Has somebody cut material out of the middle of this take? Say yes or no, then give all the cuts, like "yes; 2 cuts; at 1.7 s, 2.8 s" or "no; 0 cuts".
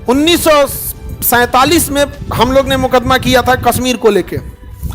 yes; 1 cut; at 2.2 s